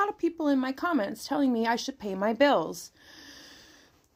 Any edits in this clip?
no; 0 cuts

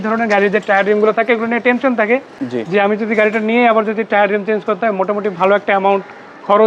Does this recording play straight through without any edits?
yes; 0 cuts

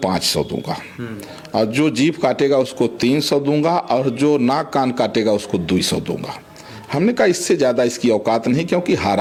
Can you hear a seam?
no; 0 cuts

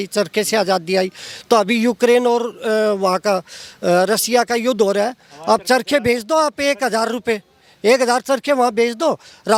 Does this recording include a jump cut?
no; 0 cuts

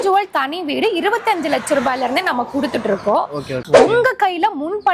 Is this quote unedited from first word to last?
no; 1 cut; at 3.7 s

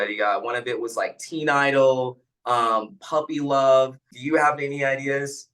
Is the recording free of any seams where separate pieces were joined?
no; 1 cut; at 4.1 s

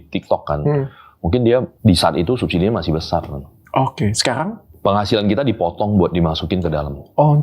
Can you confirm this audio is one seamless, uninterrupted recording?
no; 2 cuts; at 1.7 s, 4.6 s

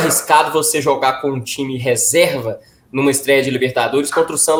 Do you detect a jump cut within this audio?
no; 0 cuts

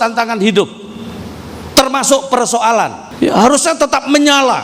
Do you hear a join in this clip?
yes; 1 cut; at 3.0 s

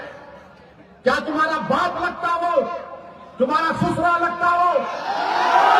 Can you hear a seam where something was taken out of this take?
no; 0 cuts

